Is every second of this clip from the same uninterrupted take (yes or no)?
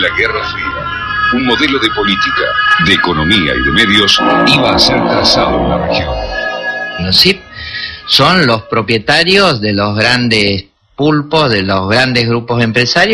yes